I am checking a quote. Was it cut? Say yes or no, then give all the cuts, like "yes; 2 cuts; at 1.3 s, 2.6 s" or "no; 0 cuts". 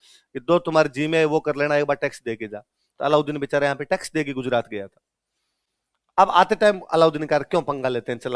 no; 0 cuts